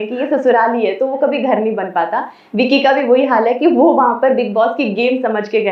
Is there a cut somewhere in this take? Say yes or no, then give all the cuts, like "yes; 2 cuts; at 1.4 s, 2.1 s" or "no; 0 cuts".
no; 0 cuts